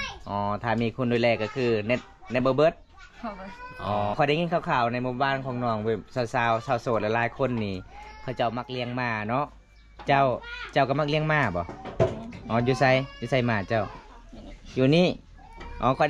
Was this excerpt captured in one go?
no; 1 cut; at 4.1 s

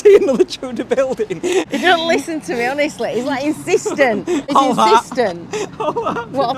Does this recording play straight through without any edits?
no; 2 cuts; at 1.7 s, 4.5 s

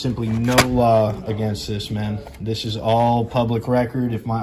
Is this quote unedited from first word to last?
yes; 0 cuts

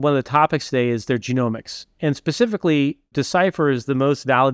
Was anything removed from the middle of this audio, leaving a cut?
no; 0 cuts

